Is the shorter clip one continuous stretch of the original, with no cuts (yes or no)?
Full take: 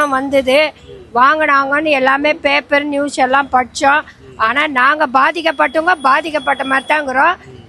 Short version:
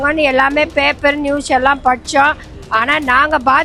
yes